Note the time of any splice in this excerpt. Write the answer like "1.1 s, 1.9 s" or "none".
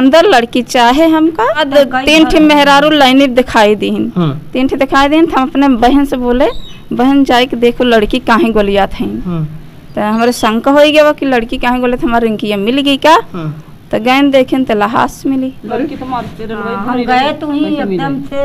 1.6 s